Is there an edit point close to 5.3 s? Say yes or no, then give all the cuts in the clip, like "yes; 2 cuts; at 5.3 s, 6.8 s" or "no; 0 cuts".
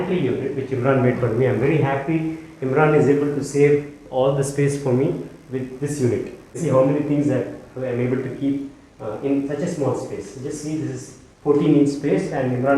no; 1 cut; at 6.6 s